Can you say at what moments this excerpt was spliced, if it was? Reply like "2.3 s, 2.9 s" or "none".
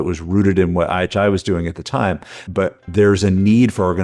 2.5 s

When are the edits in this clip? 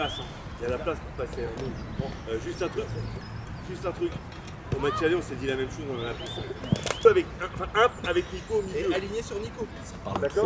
7.0 s

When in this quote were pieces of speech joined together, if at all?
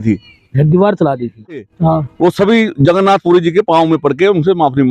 1.6 s

